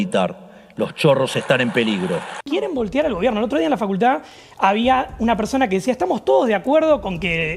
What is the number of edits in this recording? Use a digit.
1